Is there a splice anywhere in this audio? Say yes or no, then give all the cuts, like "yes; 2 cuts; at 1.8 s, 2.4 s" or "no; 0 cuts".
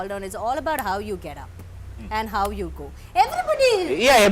no; 0 cuts